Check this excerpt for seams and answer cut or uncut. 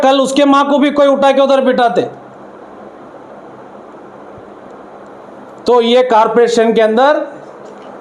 uncut